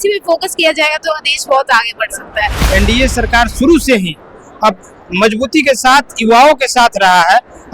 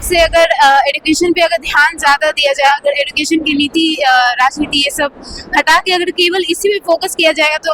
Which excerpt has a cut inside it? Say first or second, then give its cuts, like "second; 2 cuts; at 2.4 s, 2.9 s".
first; 1 cut; at 2.5 s